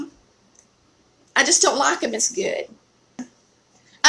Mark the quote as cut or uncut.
cut